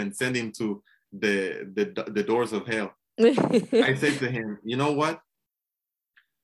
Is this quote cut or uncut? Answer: uncut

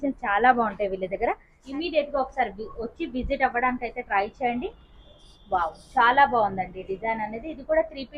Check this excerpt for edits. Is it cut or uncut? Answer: cut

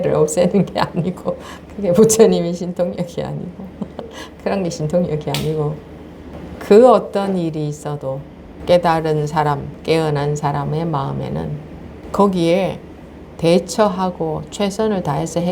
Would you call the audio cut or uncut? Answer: cut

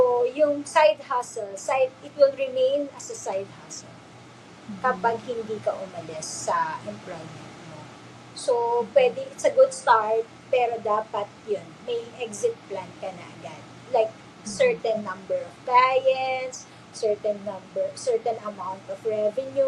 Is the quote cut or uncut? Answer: uncut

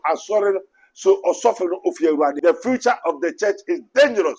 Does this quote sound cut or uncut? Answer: cut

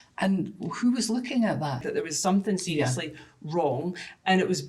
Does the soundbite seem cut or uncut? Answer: cut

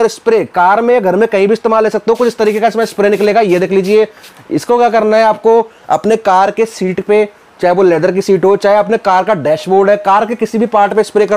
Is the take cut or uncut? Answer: uncut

